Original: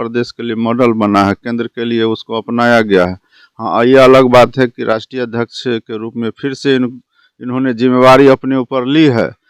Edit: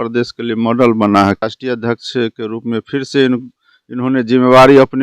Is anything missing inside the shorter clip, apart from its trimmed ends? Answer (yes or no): yes